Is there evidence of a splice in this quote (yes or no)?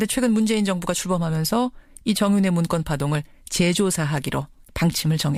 no